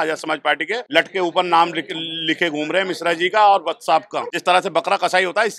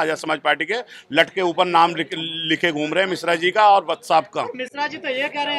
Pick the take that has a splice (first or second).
first